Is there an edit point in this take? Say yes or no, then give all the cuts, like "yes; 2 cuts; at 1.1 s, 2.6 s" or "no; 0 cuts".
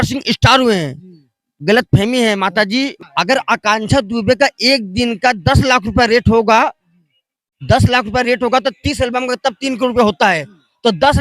yes; 1 cut; at 3.0 s